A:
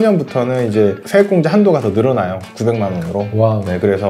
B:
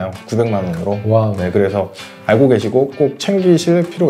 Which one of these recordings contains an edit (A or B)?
A